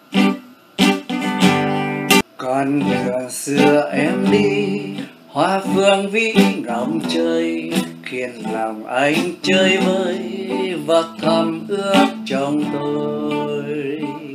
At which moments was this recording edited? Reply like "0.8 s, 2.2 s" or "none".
2.3 s